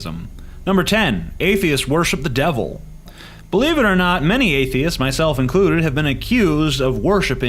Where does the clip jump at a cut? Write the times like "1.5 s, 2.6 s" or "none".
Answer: 6.6 s